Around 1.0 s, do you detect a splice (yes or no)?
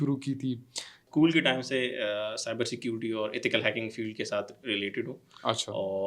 yes